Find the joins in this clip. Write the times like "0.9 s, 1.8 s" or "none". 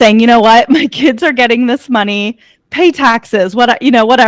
none